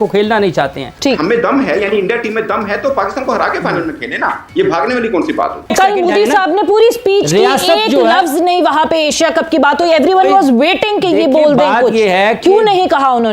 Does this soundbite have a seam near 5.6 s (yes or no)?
yes